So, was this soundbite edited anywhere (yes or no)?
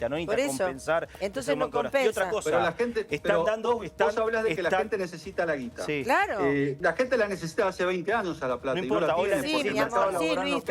yes